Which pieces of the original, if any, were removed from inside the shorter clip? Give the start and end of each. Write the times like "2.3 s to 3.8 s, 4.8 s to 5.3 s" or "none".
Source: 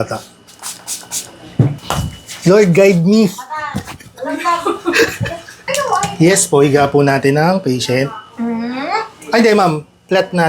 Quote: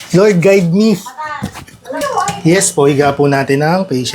4.2 s to 5.6 s